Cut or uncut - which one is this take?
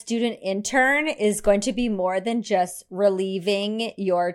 uncut